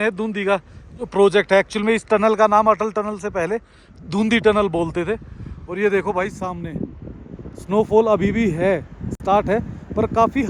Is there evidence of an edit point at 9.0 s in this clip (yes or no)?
no